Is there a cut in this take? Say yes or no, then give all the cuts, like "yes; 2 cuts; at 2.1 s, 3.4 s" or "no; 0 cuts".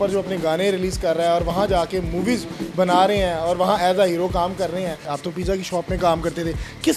yes; 1 cut; at 5.1 s